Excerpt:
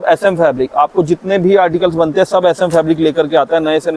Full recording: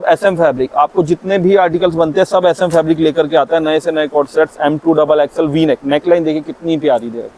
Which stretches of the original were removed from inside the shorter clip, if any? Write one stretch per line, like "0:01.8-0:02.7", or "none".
none